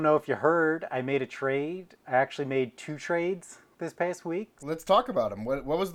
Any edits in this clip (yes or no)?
yes